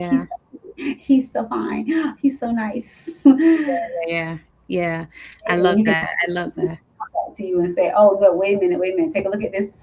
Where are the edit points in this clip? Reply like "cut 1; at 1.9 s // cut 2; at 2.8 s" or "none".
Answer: none